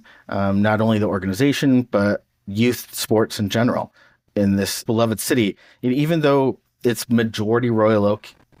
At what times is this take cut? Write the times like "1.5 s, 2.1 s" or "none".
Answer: none